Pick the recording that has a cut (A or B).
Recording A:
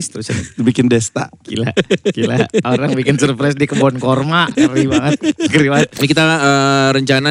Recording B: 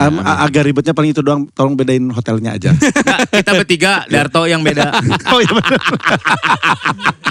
A